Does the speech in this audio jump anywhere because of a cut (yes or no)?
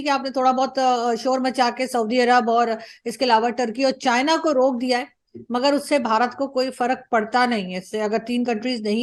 no